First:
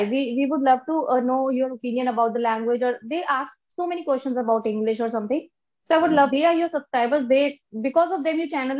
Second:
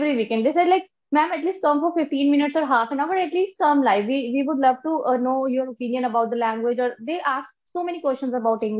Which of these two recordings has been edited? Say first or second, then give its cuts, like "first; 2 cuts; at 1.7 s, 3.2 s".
first; 1 cut; at 6.3 s